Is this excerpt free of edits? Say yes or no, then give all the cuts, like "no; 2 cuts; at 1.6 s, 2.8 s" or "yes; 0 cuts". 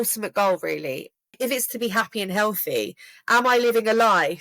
no; 1 cut; at 1.3 s